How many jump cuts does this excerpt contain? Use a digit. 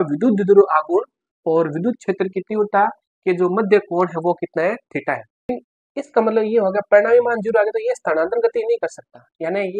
1